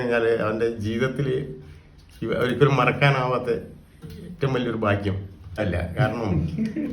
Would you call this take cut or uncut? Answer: cut